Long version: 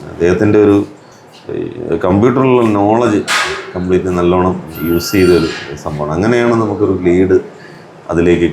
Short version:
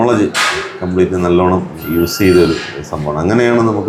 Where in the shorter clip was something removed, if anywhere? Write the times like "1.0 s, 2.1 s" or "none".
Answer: none